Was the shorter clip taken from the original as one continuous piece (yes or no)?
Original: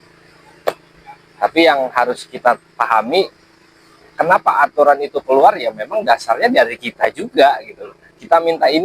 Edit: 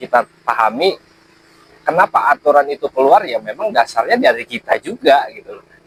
yes